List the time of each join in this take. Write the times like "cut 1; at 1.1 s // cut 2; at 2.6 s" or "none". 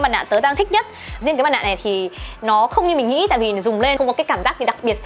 cut 1; at 1.2 s // cut 2; at 4.0 s